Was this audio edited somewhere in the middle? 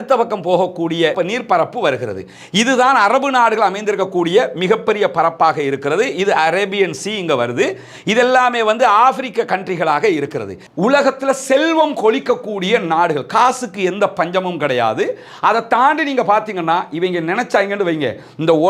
yes; 1 cut; at 10.7 s

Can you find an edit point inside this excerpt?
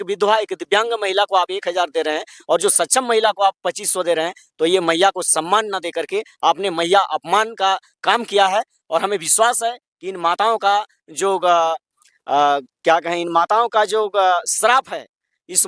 no; 0 cuts

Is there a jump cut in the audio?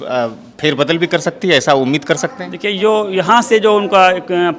no; 0 cuts

